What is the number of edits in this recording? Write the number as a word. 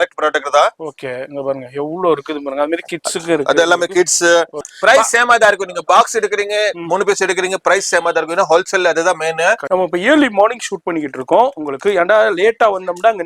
two